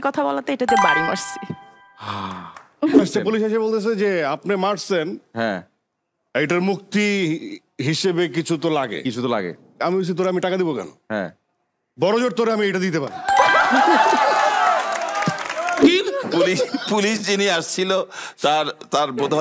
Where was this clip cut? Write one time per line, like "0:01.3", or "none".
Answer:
0:03.0
0:15.9